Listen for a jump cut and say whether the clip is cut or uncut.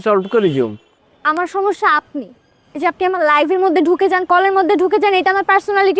uncut